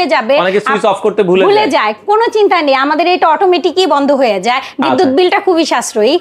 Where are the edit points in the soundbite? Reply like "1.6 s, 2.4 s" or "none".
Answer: none

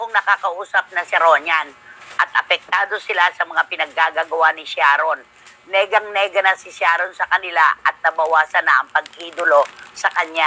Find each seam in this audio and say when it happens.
none

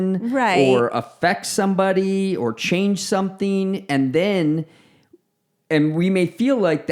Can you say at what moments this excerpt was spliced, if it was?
none

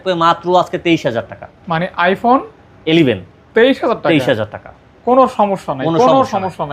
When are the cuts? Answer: none

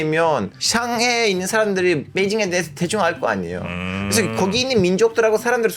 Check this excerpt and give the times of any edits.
none

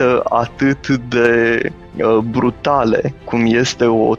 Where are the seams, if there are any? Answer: 1.8 s, 3.2 s

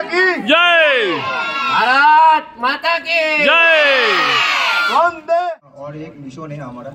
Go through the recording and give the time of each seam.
5.4 s

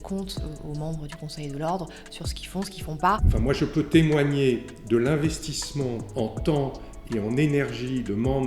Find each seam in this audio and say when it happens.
3.3 s, 6.0 s

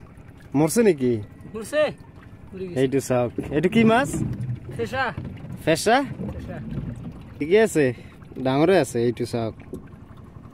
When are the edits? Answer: 7.4 s

